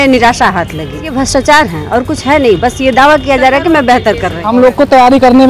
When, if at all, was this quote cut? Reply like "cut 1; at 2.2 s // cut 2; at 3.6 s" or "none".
cut 1; at 1.1 s // cut 2; at 4.4 s